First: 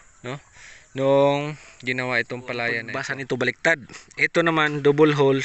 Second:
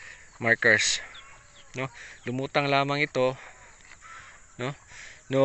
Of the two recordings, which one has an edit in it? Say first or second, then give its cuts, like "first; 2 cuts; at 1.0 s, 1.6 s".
first; 1 cut; at 3.0 s